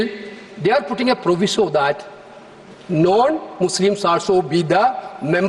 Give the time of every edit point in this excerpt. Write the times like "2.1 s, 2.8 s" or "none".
none